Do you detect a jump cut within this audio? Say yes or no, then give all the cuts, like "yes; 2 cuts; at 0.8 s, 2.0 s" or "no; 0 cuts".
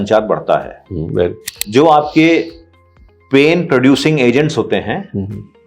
yes; 1 cut; at 1.5 s